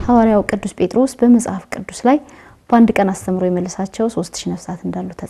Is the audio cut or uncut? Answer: uncut